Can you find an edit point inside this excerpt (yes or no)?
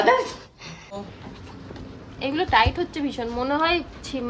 yes